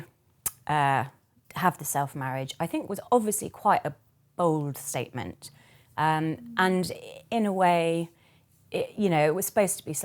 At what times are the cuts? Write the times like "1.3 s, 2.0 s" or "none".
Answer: none